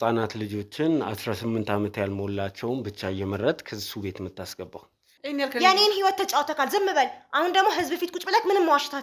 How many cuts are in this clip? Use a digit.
1